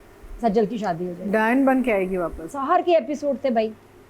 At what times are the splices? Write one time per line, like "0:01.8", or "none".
0:02.5